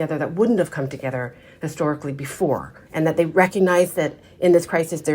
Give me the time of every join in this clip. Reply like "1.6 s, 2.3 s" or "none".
2.8 s